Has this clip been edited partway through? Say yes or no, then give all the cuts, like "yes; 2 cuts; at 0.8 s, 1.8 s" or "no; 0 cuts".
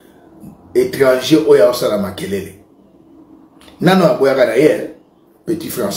no; 0 cuts